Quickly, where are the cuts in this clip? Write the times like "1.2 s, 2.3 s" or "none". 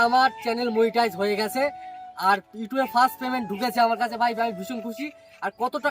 1.9 s